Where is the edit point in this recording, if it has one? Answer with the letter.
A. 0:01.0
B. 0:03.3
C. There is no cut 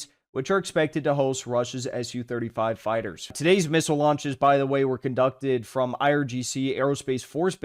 B